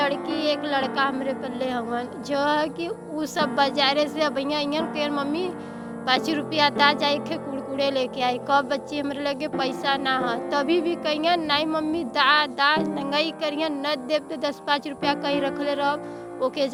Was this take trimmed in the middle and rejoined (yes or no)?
no